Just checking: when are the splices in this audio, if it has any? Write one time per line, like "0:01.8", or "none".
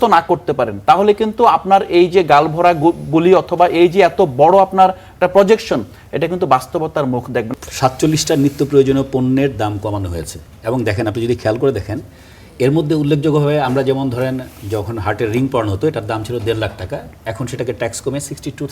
0:07.5